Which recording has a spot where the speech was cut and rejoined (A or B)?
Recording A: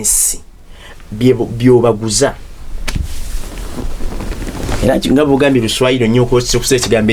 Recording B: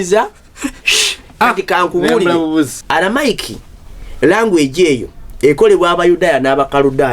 B